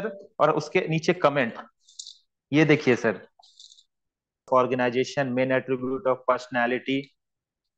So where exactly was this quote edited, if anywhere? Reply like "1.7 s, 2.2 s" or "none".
4.4 s